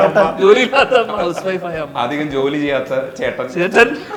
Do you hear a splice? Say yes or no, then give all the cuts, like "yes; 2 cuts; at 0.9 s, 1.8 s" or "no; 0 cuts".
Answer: no; 0 cuts